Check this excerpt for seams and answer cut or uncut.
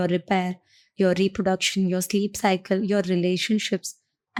uncut